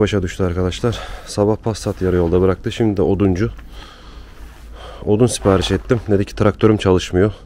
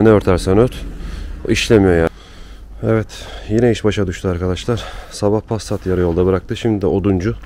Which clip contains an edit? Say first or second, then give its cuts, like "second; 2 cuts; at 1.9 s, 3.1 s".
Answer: second; 1 cut; at 2.1 s